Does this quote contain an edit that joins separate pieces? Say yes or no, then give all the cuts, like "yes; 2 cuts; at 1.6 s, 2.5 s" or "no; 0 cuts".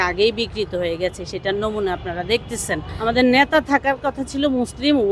yes; 1 cut; at 2.9 s